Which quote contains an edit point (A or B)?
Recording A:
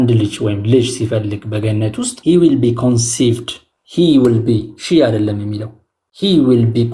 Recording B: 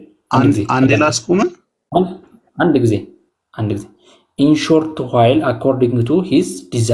A